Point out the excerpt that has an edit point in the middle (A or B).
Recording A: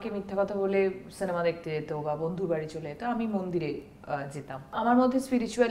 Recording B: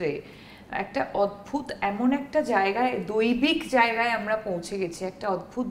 A